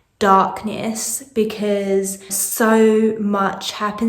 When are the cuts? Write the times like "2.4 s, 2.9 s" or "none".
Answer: 2.4 s